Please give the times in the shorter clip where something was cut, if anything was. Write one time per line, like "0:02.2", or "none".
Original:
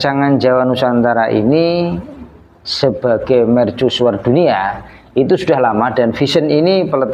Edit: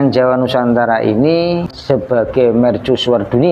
0:01.7